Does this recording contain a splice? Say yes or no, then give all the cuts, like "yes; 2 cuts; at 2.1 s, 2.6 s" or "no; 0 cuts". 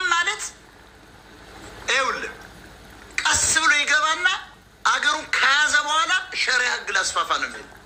no; 0 cuts